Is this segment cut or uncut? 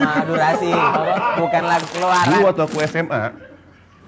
cut